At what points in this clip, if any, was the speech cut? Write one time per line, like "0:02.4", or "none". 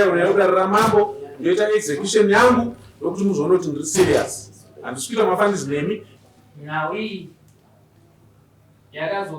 0:06.1